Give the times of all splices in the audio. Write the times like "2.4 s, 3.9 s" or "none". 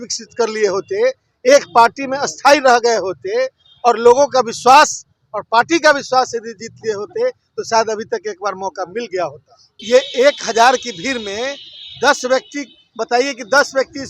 9.7 s